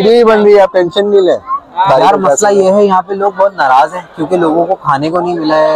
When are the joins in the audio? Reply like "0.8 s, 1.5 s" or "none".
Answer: 1.9 s